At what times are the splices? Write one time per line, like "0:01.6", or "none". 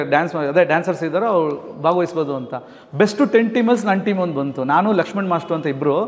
none